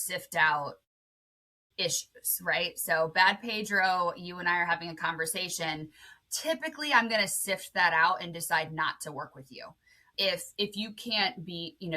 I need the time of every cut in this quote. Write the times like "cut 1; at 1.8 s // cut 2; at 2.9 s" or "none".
cut 1; at 10.1 s